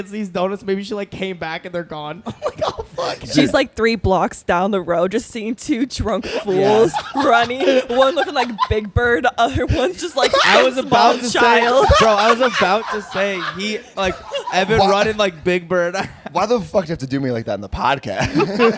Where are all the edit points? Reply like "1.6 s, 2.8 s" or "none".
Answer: none